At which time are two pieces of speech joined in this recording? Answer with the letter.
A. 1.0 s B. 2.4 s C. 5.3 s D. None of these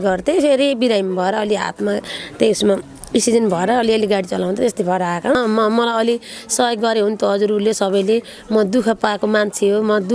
C